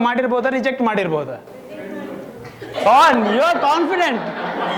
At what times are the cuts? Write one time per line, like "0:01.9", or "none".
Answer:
none

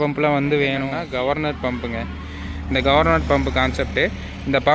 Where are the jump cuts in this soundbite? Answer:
0:00.9

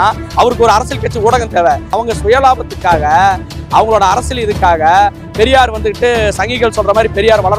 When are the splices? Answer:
0:01.9

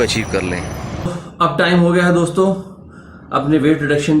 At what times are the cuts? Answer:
0:01.1

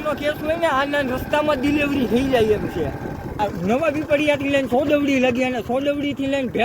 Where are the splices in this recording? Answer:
0:03.4

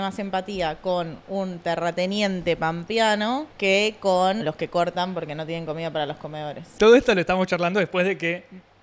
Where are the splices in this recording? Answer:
0:03.5
0:04.4
0:06.8

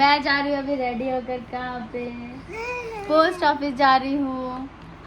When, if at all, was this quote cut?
none

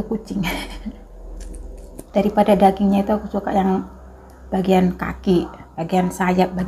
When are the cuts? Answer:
0:02.1

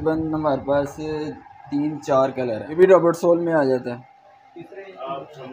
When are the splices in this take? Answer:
0:02.7

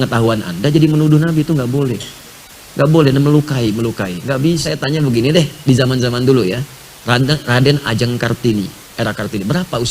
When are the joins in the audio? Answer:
0:04.7

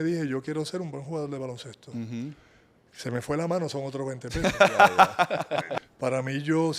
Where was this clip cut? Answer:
0:05.7

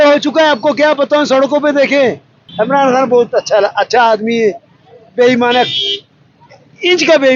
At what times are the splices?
0:02.3

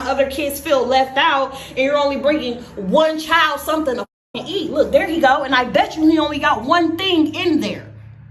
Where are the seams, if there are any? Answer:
0:06.3

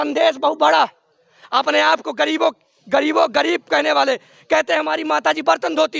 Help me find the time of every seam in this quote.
none

